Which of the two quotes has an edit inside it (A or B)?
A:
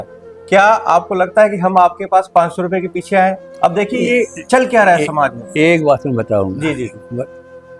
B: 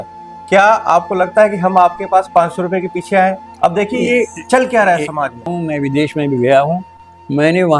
B